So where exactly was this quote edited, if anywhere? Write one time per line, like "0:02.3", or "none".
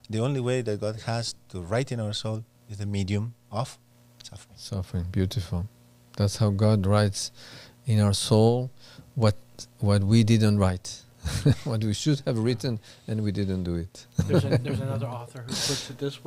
none

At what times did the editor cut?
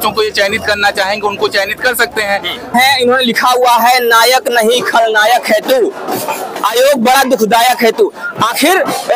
0:02.7

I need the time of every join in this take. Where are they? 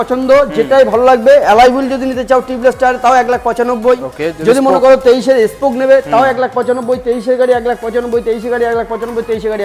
none

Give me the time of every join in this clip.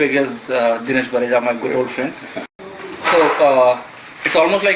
0:02.5

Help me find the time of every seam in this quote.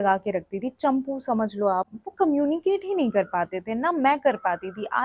0:02.0

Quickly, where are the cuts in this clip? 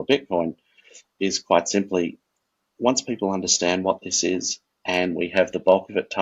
none

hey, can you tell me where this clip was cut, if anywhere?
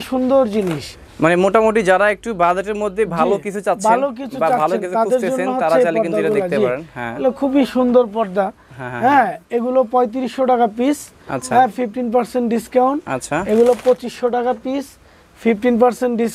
none

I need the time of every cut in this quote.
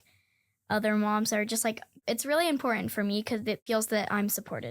0:01.9
0:03.6

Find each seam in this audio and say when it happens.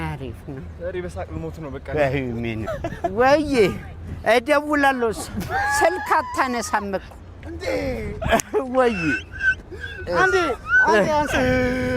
0:02.6

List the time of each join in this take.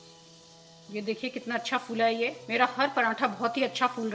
none

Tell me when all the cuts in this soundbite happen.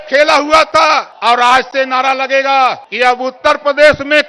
0:01.1
0:02.9

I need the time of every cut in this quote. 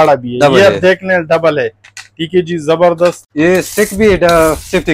0:03.2

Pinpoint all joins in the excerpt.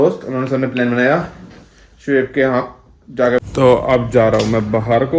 0:03.4

